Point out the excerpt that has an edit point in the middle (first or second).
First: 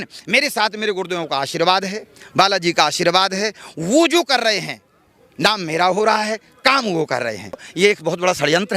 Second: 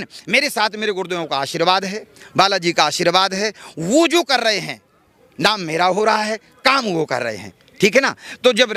first